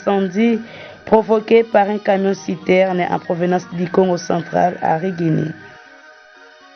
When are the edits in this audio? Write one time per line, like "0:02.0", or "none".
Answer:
0:05.6